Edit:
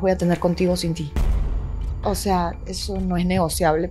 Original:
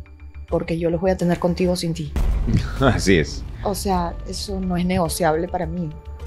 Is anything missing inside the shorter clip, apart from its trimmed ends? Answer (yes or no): yes